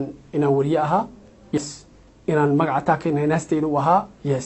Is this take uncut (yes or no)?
no